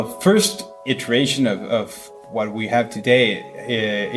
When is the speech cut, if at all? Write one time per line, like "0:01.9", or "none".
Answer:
0:02.0